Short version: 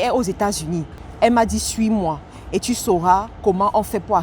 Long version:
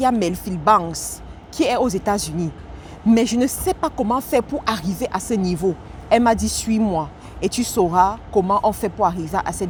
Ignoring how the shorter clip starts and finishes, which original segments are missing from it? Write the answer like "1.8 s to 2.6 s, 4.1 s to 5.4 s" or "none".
2.7 s to 5.9 s